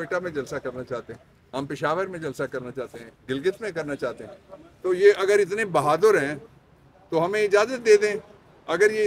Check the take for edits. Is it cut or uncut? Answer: uncut